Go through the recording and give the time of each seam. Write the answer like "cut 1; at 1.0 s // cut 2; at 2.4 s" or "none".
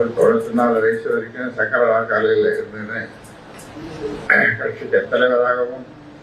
none